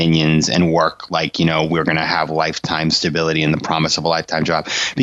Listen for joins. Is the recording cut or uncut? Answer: uncut